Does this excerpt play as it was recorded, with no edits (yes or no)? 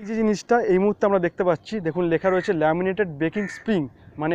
yes